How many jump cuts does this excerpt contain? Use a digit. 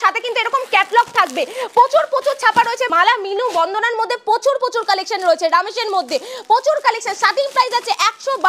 0